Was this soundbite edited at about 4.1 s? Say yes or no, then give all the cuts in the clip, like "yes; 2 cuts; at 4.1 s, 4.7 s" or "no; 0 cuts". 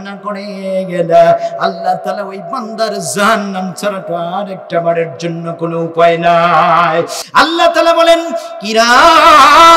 no; 1 cut; at 7.2 s